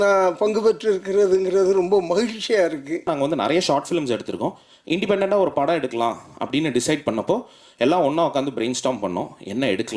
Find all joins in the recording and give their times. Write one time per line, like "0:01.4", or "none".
0:03.1